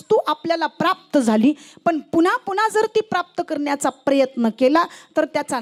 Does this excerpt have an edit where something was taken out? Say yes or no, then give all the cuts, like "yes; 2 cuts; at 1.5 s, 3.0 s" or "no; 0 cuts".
no; 0 cuts